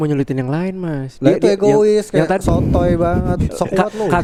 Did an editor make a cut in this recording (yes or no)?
no